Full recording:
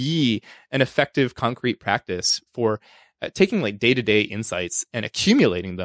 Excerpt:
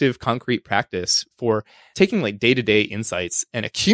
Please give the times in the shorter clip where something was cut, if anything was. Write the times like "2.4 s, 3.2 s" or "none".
1.8 s